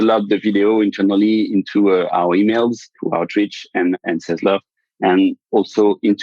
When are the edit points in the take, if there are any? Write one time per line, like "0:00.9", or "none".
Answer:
0:02.9
0:04.0